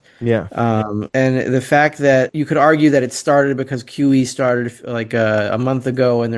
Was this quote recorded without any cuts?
no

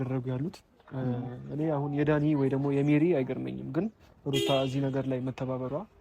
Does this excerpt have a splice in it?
no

